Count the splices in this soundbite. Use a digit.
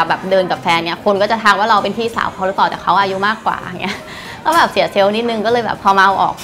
1